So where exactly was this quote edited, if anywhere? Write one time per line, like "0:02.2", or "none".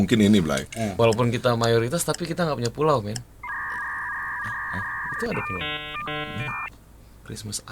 0:00.9